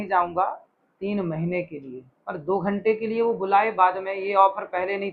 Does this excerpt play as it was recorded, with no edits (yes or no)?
yes